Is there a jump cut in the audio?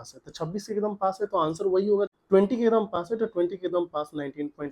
yes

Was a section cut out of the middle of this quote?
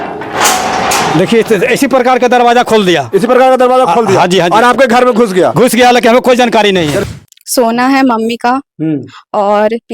yes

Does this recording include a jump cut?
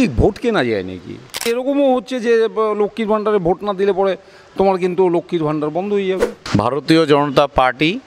yes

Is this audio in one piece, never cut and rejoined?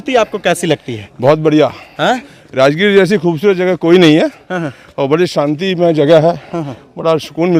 yes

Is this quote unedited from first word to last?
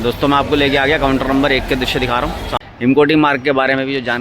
no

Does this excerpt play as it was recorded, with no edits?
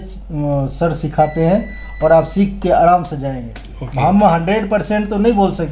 yes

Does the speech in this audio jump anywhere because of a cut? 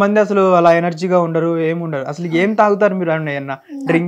no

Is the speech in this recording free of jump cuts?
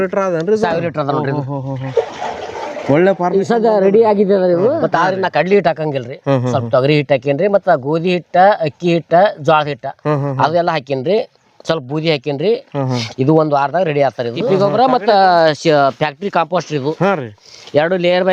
no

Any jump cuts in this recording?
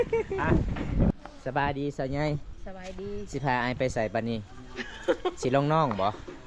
yes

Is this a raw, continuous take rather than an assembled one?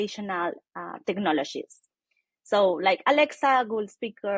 yes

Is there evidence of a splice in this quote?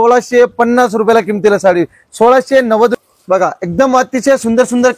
yes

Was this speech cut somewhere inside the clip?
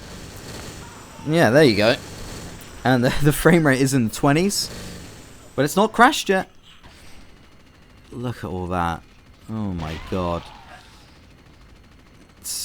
yes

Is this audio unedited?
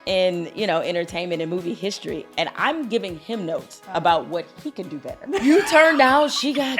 no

